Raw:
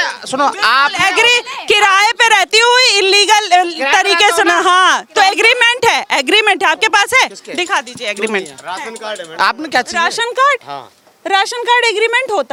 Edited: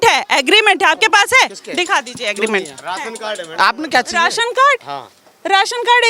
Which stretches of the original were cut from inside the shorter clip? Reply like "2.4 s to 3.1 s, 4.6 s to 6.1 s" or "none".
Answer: none